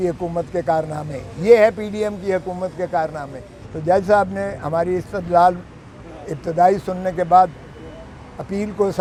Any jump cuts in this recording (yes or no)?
no